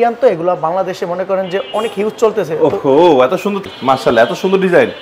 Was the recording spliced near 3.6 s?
yes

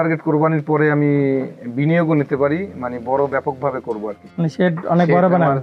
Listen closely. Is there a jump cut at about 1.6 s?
no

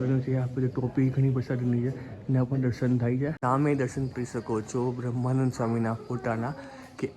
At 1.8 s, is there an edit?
no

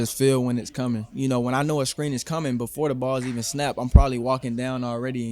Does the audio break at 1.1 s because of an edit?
yes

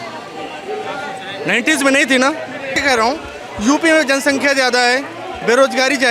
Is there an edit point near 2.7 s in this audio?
yes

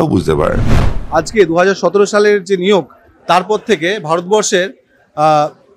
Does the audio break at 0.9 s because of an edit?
yes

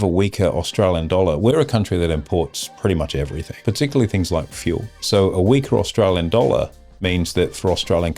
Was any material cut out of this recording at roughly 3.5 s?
yes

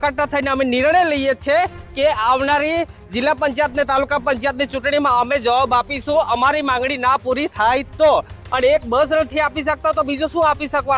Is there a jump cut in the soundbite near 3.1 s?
no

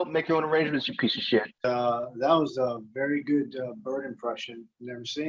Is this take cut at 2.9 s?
no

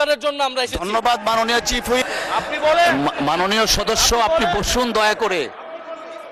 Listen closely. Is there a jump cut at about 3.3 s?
no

